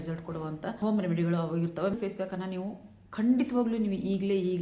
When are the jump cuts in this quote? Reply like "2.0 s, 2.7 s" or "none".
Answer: 0.8 s, 1.9 s